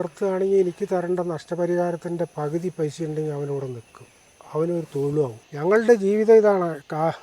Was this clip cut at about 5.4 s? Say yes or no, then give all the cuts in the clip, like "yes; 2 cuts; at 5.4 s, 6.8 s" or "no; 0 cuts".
yes; 1 cut; at 5.4 s